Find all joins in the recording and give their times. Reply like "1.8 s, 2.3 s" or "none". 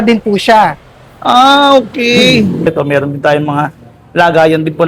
2.7 s